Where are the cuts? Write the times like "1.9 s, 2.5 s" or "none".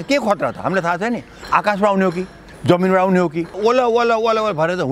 3.6 s